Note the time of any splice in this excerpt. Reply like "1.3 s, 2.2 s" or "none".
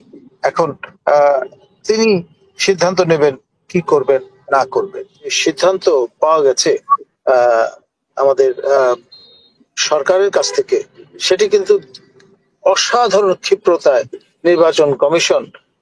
5.4 s